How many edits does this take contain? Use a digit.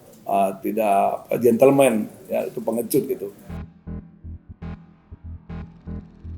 1